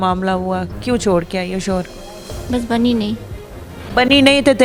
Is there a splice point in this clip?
no; 0 cuts

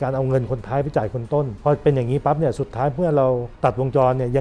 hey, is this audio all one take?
no; 2 cuts; at 1.5 s, 3.5 s

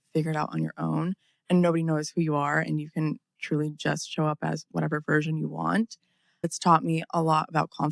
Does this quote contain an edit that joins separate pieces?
yes; 1 cut; at 6.5 s

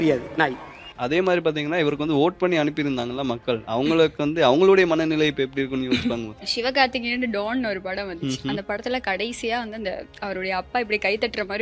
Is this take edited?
yes; 2 cuts; at 0.9 s, 6.5 s

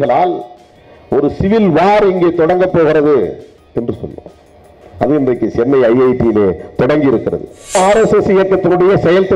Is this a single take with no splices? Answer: no; 1 cut; at 7.8 s

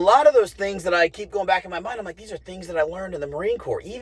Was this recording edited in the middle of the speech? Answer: no; 0 cuts

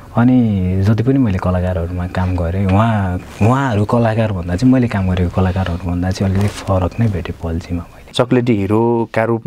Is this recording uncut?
no; 1 cut; at 8.1 s

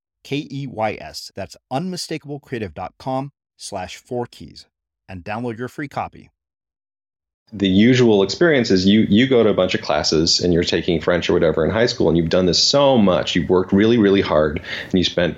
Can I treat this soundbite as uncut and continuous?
no; 1 cut; at 7.5 s

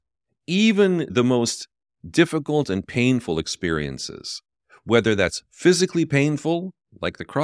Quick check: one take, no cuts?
yes; 0 cuts

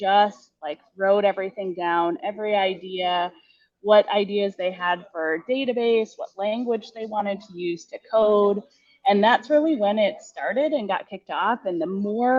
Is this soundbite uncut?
yes; 0 cuts

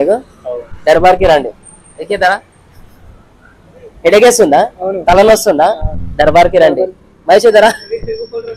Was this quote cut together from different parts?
no; 0 cuts

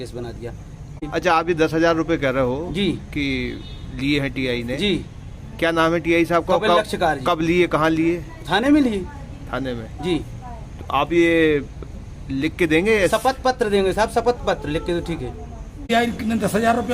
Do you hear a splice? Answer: yes; 2 cuts; at 1.0 s, 15.9 s

